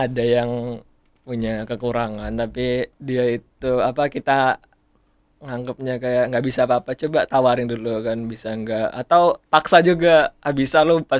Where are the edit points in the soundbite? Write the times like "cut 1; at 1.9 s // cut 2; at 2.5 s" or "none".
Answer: cut 1; at 3.0 s